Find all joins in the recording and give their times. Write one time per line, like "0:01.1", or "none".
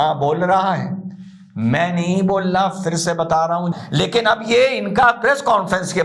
0:03.7